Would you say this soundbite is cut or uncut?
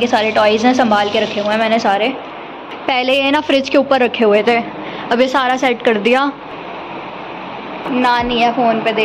uncut